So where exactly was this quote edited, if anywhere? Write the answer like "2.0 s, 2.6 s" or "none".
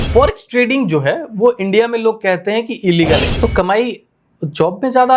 3.3 s